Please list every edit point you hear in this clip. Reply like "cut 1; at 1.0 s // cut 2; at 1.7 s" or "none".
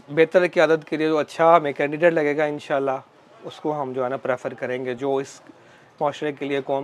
none